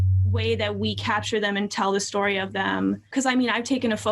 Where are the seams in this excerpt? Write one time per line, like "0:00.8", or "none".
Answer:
0:03.1